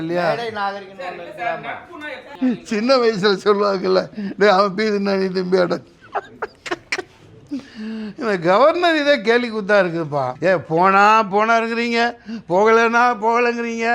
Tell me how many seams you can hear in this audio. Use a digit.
2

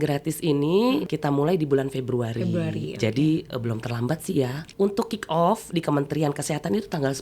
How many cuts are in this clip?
2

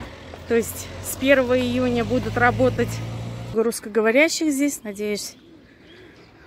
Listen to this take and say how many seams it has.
1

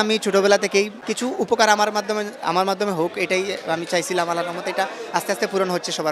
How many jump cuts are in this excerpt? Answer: 1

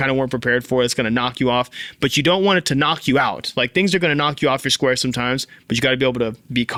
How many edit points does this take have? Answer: 0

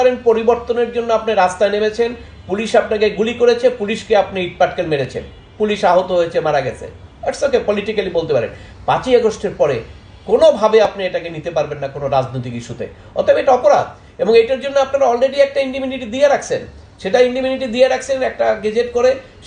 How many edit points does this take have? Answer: 0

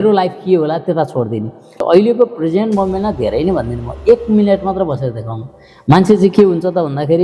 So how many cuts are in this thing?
1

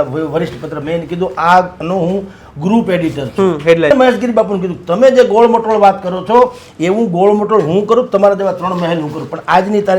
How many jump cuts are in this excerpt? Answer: 1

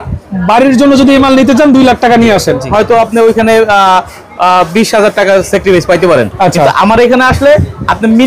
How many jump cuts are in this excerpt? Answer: 1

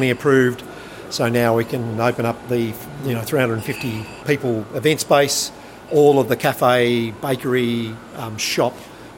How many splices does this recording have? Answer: 2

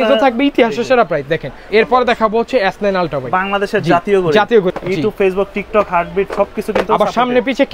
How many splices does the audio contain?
2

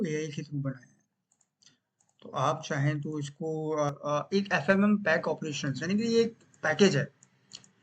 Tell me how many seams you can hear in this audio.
1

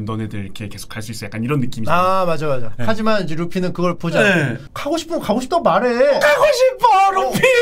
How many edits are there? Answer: 1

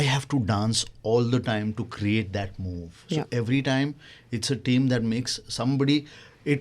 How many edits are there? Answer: 0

